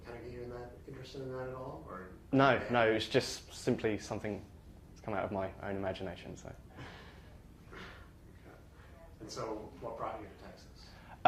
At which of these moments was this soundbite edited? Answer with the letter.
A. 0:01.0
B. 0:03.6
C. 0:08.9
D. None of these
D